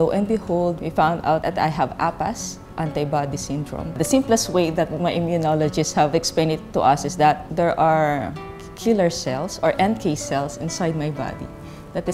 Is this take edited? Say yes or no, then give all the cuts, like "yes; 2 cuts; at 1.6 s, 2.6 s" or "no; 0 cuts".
no; 0 cuts